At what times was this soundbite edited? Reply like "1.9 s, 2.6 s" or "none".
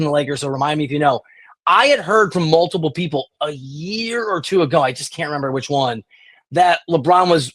none